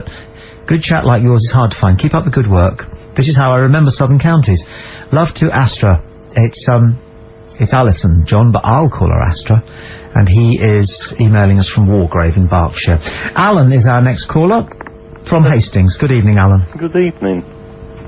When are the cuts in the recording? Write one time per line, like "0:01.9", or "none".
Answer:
0:14.0